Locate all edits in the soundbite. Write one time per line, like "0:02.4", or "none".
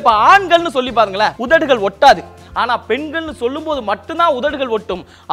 0:01.4
0:02.3